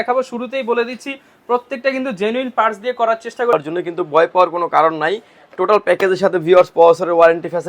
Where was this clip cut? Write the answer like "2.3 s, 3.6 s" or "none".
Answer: 3.5 s